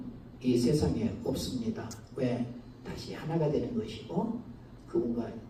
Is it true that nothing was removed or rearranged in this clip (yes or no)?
yes